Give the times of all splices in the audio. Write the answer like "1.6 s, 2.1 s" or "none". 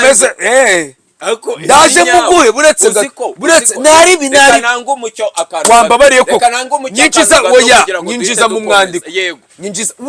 none